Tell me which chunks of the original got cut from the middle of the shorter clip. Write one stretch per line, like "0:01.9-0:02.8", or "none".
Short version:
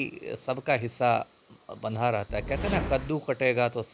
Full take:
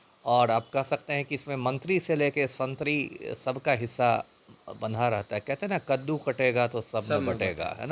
none